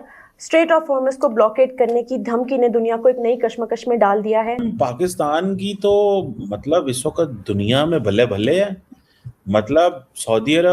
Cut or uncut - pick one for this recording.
cut